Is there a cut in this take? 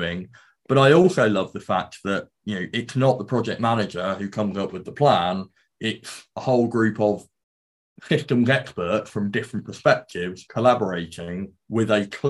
no; 0 cuts

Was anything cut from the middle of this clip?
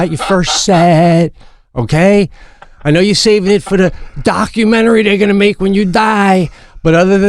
no; 0 cuts

